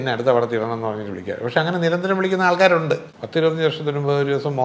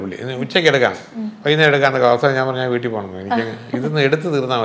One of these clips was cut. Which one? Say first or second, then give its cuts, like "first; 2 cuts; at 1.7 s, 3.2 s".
first; 1 cut; at 3.1 s